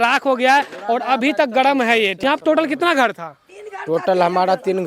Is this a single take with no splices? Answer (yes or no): no